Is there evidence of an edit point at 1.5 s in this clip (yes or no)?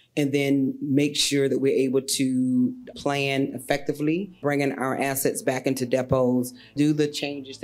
no